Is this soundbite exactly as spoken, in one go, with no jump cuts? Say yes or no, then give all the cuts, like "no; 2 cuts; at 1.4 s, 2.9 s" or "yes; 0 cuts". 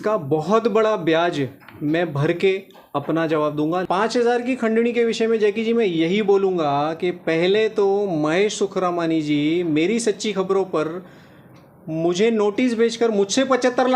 no; 1 cut; at 3.9 s